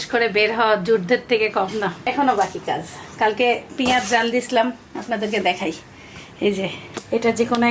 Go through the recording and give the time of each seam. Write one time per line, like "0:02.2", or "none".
none